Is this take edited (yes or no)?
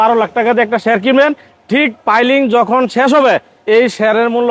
no